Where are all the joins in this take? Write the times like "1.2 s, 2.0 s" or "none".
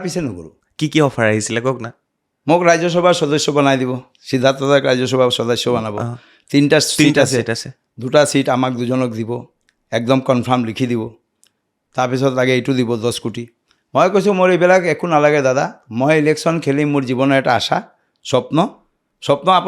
none

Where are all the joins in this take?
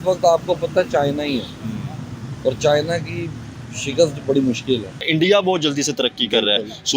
4.9 s

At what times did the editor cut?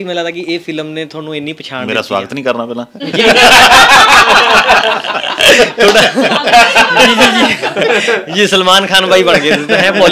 none

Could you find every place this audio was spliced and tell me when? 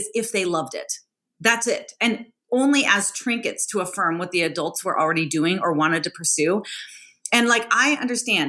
none

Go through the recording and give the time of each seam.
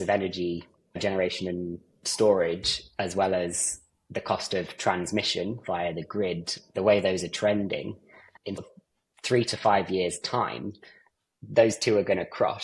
none

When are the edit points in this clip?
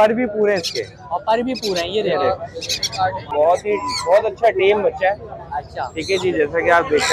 3.3 s

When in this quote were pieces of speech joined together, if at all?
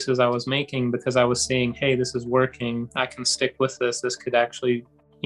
none

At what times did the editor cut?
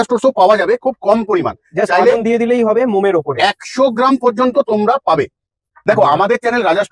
5.8 s

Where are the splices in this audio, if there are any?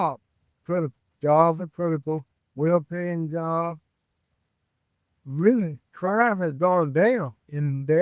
none

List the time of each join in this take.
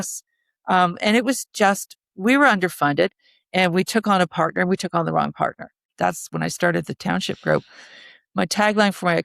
5.8 s

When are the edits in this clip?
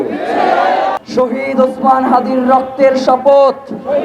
0.9 s

